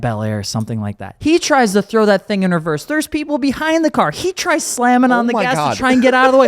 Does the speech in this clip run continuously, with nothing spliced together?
no; 1 cut; at 1.1 s

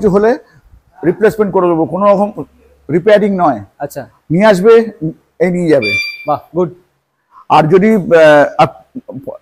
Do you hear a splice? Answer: no; 0 cuts

